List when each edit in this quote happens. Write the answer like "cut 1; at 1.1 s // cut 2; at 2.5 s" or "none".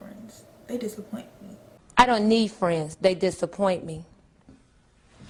none

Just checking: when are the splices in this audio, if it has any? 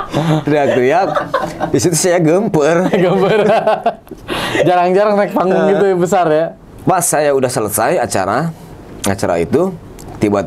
none

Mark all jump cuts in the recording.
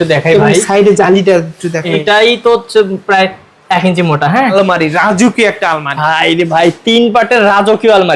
cut 1; at 2.0 s // cut 2; at 4.3 s

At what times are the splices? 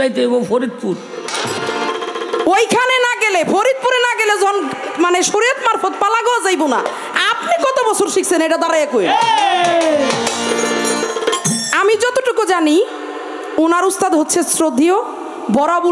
cut 1; at 1.3 s

